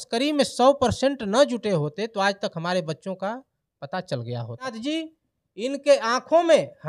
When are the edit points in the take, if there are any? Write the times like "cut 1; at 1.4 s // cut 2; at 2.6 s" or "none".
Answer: cut 1; at 4.7 s